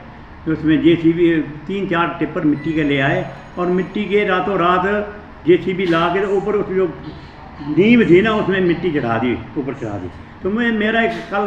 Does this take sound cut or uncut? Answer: uncut